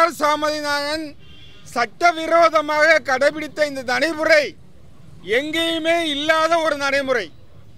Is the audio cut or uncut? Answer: uncut